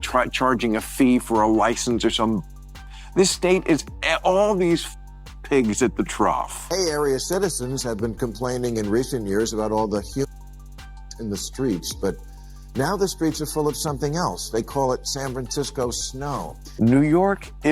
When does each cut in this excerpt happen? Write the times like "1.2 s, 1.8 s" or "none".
6.5 s, 16.6 s